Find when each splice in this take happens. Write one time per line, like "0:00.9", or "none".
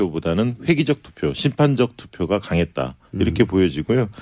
0:01.7